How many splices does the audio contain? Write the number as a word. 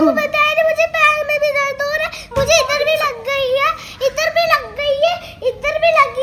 zero